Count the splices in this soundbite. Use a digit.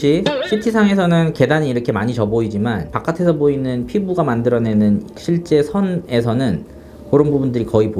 0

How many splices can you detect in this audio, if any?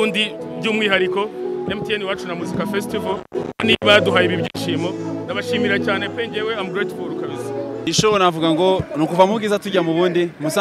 1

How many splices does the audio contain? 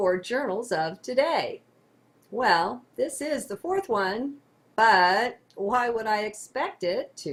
0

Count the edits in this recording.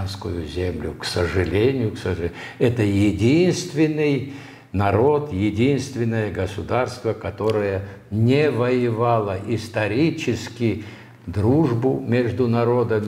0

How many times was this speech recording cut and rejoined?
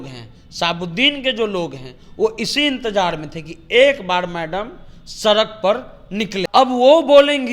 1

